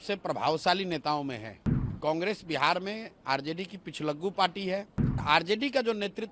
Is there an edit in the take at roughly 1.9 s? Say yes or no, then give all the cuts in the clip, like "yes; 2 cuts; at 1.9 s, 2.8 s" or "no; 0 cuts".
yes; 2 cuts; at 1.9 s, 5.2 s